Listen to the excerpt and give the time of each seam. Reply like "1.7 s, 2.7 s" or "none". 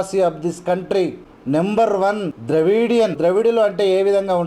1.3 s, 2.3 s, 3.2 s